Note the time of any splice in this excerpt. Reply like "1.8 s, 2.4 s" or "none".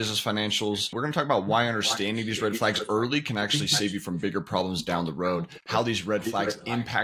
none